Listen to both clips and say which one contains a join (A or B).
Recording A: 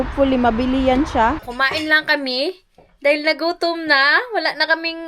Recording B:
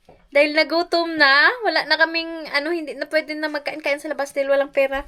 A